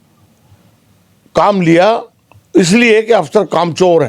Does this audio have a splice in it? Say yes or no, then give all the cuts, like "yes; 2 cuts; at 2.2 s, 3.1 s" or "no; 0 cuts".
no; 0 cuts